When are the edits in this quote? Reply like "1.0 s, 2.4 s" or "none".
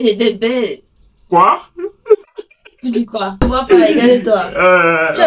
3.5 s